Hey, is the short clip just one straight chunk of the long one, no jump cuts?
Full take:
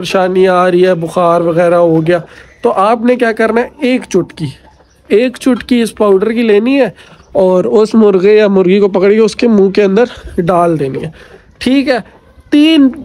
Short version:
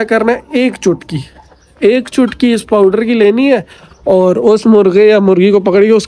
yes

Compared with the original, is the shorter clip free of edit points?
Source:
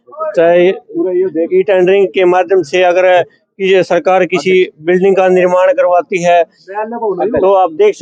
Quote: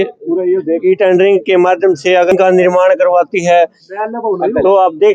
no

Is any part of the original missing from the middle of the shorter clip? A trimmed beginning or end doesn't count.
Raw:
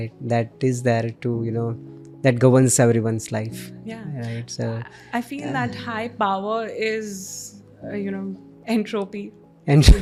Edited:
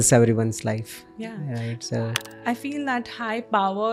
no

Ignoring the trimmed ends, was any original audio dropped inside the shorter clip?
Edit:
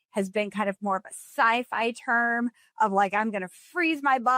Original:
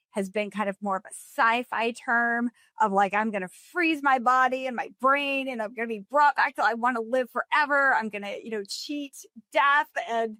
no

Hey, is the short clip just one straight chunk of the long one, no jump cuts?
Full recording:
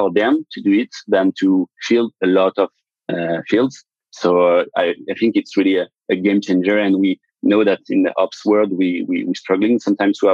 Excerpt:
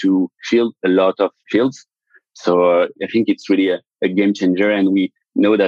no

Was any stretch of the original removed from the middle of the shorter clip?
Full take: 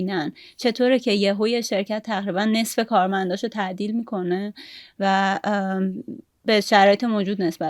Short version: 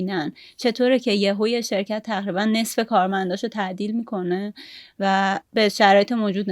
yes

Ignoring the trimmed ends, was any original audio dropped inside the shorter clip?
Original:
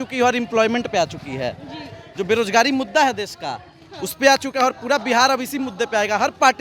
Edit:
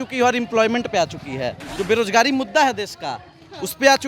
yes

